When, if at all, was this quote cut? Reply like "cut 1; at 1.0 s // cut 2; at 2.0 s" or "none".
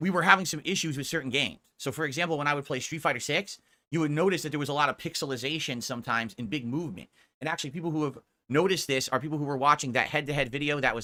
none